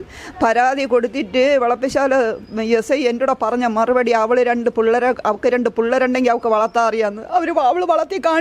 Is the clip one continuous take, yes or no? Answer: yes